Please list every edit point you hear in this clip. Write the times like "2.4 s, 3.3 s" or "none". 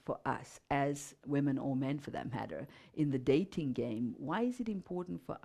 1.1 s